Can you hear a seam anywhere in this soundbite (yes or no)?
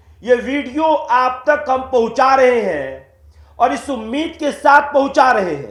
no